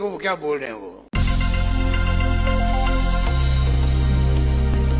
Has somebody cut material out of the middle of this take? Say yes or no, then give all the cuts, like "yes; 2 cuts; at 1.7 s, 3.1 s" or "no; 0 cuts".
yes; 1 cut; at 1.0 s